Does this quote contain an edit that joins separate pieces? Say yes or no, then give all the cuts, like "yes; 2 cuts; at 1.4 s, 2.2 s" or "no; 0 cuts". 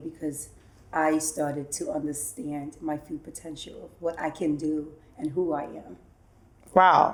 no; 0 cuts